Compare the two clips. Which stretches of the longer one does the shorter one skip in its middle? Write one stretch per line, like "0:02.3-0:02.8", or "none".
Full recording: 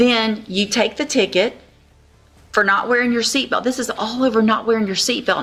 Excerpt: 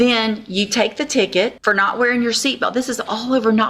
0:01.6-0:02.5